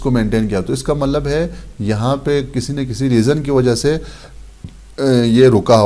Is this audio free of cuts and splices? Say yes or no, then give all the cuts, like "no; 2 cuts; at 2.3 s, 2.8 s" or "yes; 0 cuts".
yes; 0 cuts